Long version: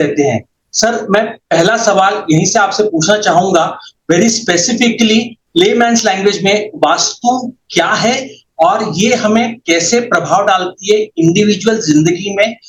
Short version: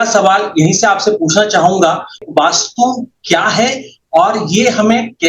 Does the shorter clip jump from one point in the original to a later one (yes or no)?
yes